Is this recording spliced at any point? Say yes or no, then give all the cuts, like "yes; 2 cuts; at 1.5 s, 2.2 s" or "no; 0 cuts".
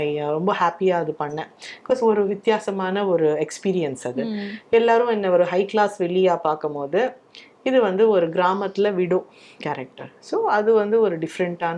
no; 0 cuts